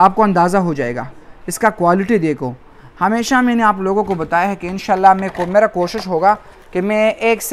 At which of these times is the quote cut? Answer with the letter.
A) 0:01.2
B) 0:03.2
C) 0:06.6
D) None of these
D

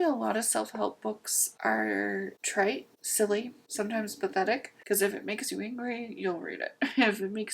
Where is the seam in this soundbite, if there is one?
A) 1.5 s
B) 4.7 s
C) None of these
B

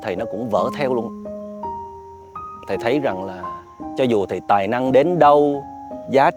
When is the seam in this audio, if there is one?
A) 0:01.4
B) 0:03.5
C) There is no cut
C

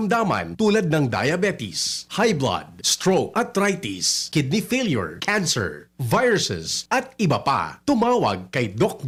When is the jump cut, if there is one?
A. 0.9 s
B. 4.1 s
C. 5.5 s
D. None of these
D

